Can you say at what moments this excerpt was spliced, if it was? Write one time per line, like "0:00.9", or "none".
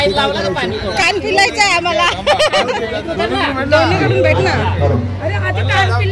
0:03.0